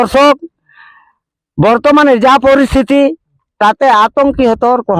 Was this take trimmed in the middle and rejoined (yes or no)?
no